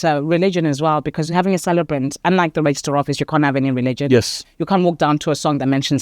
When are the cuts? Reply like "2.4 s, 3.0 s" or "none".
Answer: 4.4 s